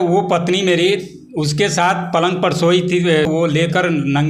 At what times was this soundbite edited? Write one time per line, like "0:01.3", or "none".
0:03.3